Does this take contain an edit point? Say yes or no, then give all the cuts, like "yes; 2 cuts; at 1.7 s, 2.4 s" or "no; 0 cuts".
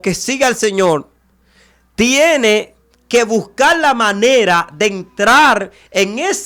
no; 0 cuts